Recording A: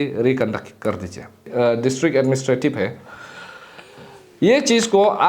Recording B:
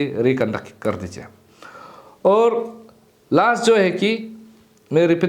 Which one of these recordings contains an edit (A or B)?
A